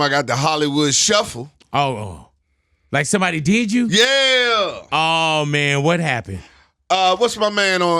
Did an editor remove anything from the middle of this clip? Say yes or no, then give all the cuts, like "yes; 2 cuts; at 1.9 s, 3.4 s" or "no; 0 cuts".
no; 0 cuts